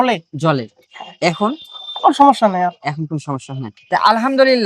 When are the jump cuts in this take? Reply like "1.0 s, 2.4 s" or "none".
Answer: none